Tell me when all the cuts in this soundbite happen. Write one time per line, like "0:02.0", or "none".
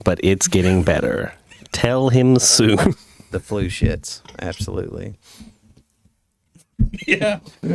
none